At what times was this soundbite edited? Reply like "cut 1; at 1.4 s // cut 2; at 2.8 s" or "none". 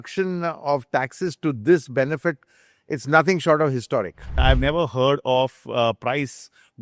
cut 1; at 4.3 s